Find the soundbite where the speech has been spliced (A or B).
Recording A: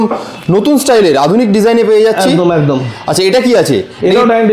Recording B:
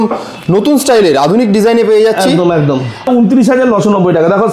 B